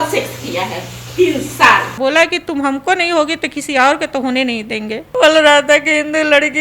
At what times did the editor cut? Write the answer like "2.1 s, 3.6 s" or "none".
2.0 s, 5.1 s